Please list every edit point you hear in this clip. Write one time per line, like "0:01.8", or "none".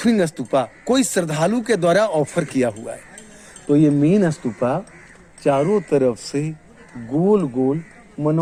none